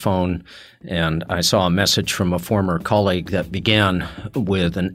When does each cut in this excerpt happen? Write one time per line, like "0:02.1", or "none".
none